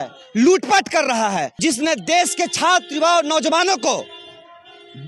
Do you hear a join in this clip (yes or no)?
yes